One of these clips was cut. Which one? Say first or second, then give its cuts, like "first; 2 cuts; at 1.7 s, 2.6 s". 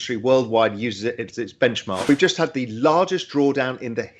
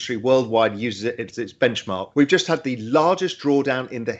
first; 1 cut; at 2.1 s